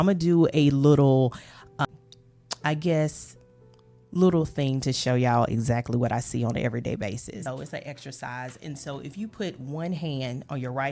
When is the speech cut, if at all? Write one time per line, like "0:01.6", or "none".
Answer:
0:01.9
0:07.4